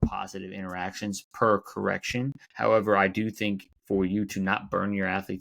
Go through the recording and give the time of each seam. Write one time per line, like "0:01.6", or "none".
0:02.4
0:03.7